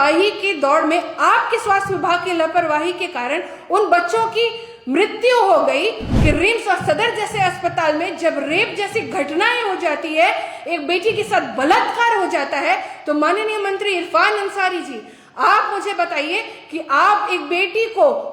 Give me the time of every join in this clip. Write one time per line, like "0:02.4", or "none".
0:06.1